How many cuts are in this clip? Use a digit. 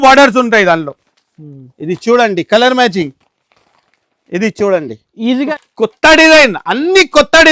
1